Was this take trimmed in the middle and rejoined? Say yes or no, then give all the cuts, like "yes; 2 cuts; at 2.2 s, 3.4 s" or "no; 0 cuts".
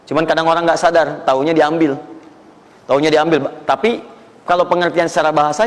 no; 0 cuts